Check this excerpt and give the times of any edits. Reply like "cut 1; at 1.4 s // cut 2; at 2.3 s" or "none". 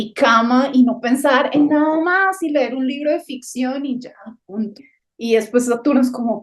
cut 1; at 4.9 s

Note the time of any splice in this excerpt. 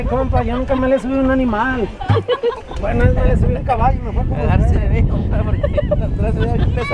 none

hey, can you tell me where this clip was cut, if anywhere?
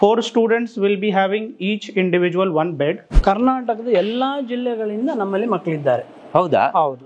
cut 1; at 3.1 s

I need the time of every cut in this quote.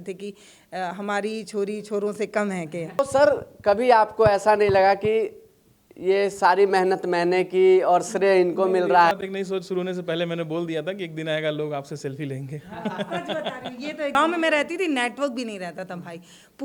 cut 1; at 3.0 s // cut 2; at 9.1 s // cut 3; at 14.2 s

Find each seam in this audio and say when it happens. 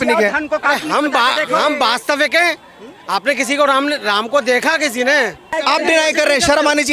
cut 1; at 5.4 s

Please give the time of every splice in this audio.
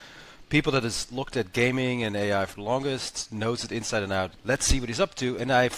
cut 1; at 4.3 s

